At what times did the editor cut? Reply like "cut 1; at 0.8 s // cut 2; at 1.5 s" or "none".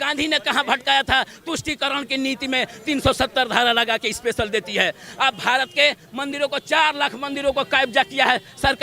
none